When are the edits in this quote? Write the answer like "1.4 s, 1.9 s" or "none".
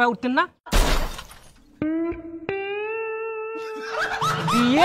3.9 s